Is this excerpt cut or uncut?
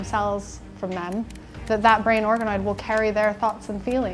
uncut